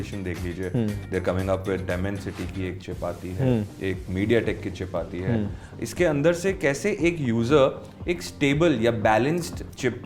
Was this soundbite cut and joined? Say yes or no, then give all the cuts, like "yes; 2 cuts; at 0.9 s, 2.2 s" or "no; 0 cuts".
no; 0 cuts